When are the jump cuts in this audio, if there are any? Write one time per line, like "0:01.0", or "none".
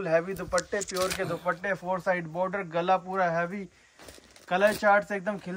none